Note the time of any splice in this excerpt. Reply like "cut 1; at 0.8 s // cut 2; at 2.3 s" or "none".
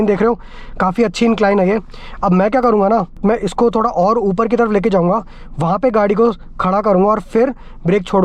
cut 1; at 3.2 s